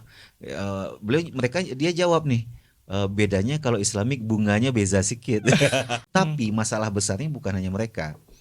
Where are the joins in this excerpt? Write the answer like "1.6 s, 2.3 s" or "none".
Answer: 6.0 s